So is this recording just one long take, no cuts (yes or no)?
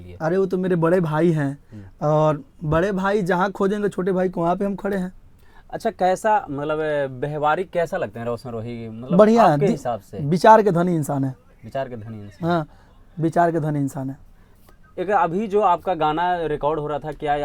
yes